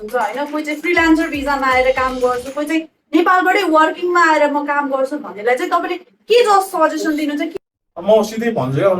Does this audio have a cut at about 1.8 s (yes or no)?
no